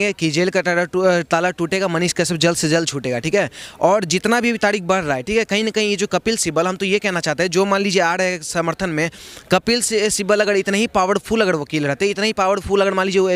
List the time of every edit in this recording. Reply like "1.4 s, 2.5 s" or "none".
none